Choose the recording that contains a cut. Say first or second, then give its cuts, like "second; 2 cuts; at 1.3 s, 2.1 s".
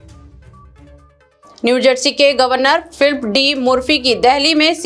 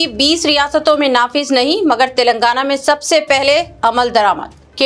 first; 1 cut; at 1.0 s